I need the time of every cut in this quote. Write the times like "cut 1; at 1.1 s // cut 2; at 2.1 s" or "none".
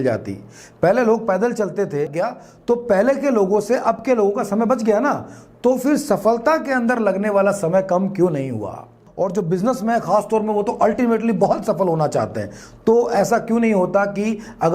cut 1; at 2.1 s // cut 2; at 9.0 s